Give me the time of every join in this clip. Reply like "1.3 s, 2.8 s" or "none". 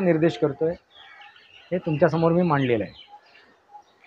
none